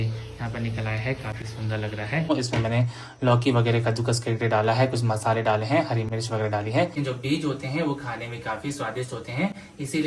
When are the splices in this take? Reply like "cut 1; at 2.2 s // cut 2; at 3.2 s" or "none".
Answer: cut 1; at 2.3 s // cut 2; at 6.9 s